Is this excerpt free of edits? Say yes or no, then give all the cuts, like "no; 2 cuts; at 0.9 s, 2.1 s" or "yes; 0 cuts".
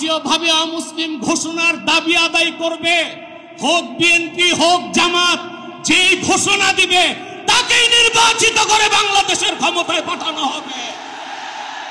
yes; 0 cuts